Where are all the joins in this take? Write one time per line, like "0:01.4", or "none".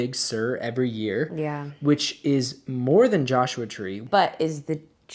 0:04.0